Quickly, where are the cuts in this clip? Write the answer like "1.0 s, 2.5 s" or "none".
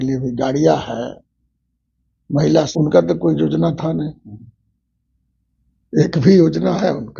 2.7 s